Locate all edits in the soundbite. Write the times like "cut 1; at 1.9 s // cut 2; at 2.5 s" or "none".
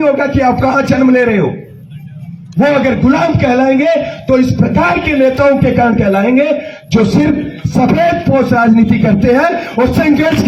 none